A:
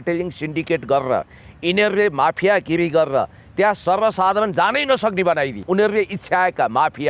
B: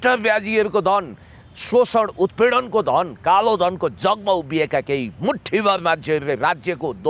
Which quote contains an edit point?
A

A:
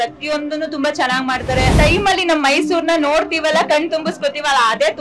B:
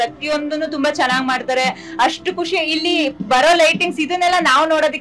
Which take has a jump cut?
A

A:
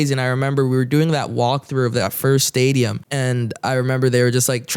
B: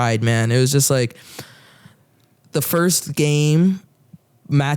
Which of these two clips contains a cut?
A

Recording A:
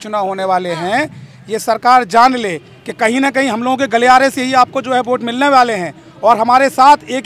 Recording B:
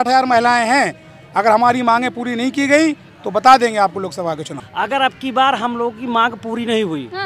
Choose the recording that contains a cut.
B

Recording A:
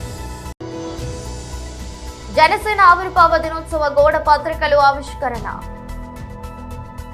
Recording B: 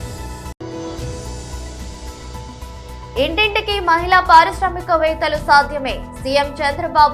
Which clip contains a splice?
A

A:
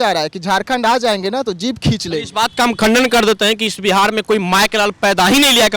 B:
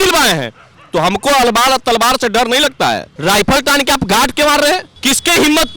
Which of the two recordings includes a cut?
B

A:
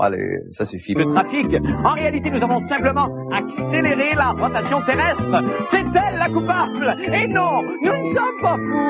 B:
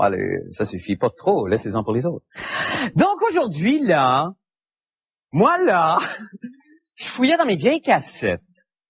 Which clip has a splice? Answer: B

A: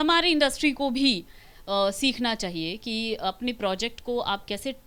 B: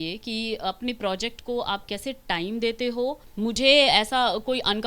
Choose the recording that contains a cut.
B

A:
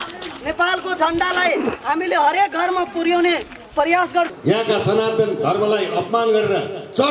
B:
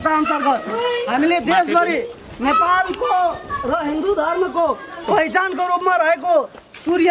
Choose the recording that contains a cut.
A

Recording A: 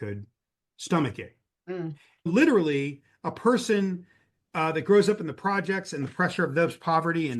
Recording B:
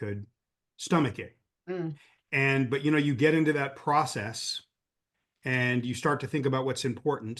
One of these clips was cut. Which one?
A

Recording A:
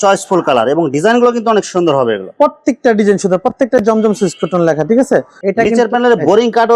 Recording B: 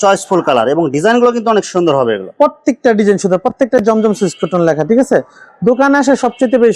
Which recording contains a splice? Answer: A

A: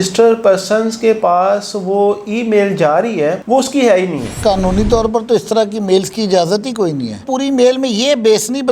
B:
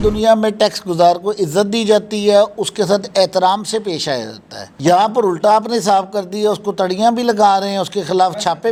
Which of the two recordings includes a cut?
A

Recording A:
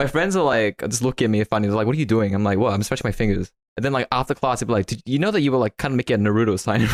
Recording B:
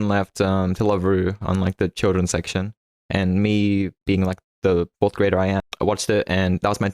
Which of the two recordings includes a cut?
B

